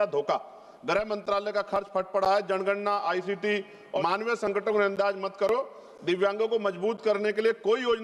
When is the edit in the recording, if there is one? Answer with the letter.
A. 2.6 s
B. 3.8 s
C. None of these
B